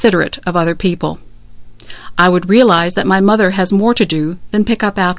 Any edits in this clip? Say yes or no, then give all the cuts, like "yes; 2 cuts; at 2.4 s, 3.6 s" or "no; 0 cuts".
yes; 1 cut; at 1.3 s